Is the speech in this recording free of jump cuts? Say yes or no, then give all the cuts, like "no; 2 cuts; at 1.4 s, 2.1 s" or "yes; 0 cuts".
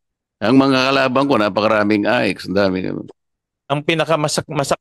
no; 1 cut; at 3.5 s